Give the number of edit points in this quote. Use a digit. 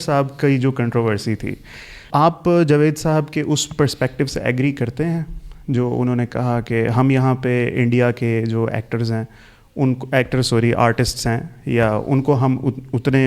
1